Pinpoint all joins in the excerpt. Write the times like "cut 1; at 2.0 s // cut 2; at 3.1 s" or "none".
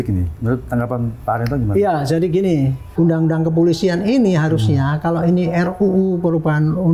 cut 1; at 2.8 s